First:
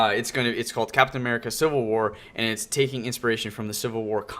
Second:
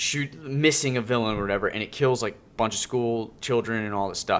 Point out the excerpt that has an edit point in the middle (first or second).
first